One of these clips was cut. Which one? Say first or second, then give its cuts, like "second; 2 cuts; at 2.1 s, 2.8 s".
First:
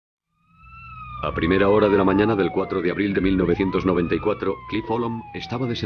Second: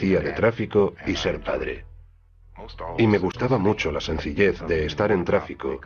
first; 1 cut; at 4.6 s